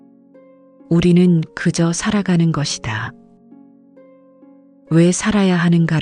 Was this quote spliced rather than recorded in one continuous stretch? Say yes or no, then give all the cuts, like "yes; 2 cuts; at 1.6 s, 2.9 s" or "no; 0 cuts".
yes; 3 cuts; at 0.9 s, 3.0 s, 4.9 s